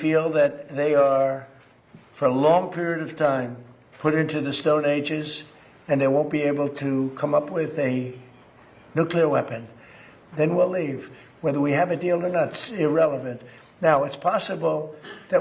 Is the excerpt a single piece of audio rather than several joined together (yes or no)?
yes